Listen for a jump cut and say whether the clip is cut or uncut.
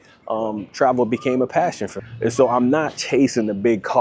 cut